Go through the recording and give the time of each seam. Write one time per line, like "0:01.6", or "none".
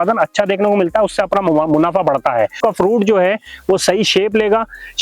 0:02.6